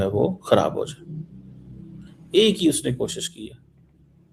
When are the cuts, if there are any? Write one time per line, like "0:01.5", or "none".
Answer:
none